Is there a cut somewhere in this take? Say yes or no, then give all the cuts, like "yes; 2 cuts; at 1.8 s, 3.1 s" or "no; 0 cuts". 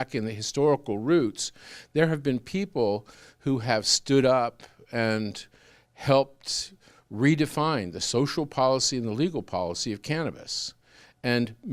no; 0 cuts